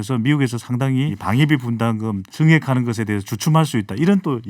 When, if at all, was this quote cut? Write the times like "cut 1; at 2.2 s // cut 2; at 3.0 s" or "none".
cut 1; at 1.2 s // cut 2; at 2.3 s